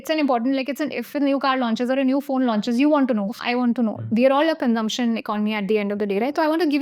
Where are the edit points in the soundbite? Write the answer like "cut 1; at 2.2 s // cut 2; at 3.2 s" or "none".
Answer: cut 1; at 4.0 s